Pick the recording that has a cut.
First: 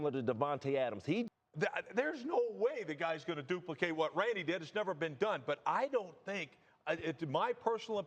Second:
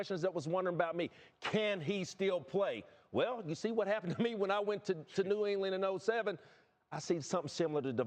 first; 1 cut; at 1.3 s

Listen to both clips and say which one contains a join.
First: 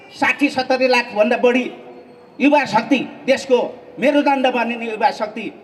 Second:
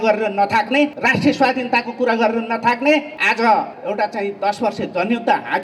second; 3 cuts; at 1.0 s, 3.1 s, 3.8 s

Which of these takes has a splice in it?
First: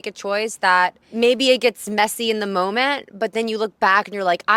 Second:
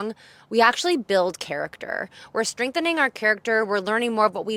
first; 1 cut; at 1.0 s

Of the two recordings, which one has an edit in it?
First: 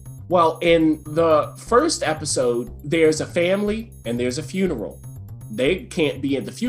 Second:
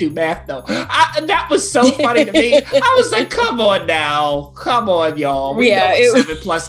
first; 1 cut; at 1.0 s

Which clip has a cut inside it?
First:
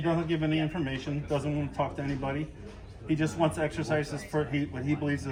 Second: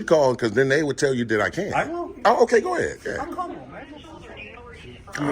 second; 1 cut; at 3.7 s

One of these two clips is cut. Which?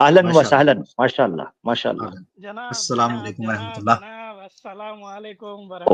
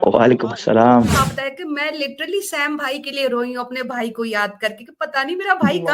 second; 1 cut; at 1.2 s

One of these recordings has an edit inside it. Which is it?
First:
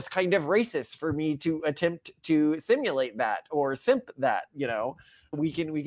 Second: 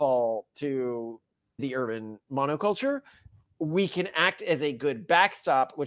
second; 1 cut; at 1.6 s

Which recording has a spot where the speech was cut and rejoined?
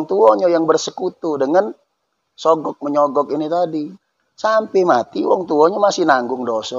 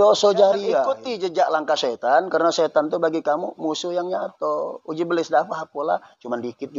second; 1 cut; at 1.0 s

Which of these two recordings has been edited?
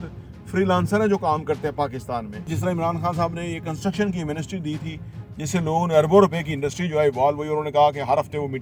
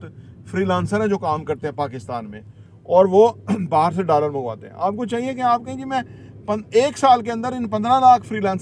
first; 1 cut; at 2.5 s

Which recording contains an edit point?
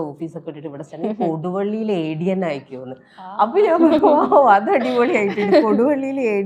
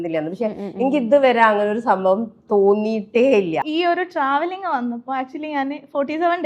second; 1 cut; at 3.6 s

